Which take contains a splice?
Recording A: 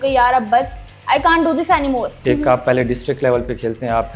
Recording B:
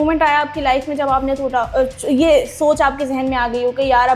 A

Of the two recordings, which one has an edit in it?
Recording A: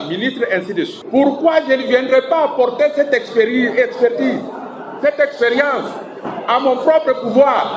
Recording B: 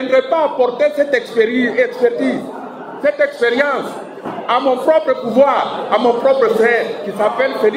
A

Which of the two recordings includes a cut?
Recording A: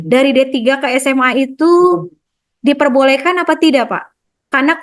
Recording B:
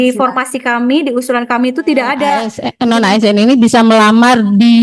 B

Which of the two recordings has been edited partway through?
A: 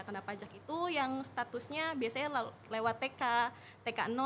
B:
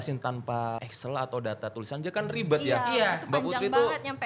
B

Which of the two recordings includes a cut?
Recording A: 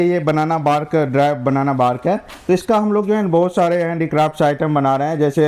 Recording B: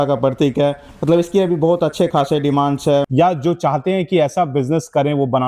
B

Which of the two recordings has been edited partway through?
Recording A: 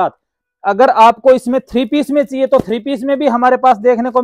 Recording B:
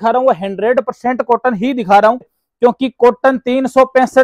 B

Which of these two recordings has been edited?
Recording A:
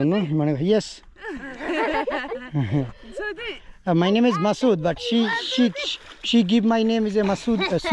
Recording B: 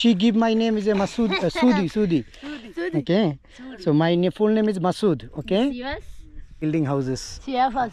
B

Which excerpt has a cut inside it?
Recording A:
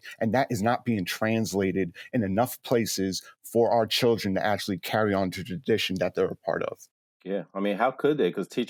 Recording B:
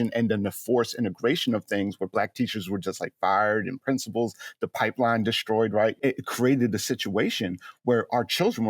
B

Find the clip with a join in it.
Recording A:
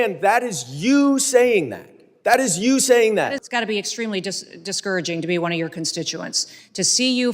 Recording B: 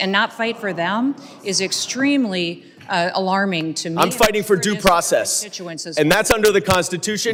A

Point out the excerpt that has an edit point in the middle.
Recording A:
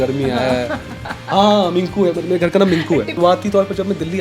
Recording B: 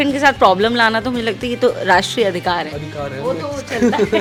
A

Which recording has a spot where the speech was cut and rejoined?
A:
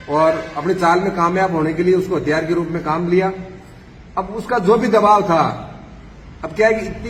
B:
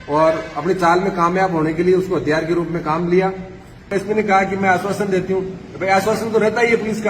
B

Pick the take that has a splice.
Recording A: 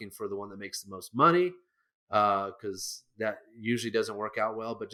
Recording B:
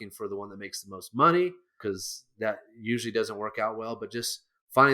B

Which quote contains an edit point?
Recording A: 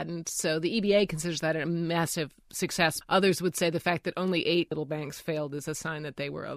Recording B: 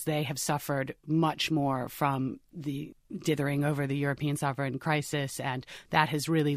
A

